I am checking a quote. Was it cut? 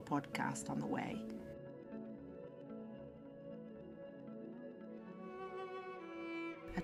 no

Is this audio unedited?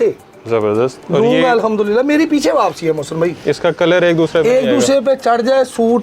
yes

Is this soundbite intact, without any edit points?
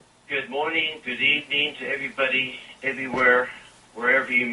yes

